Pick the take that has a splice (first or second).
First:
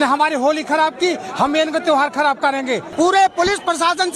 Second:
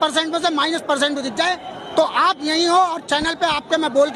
first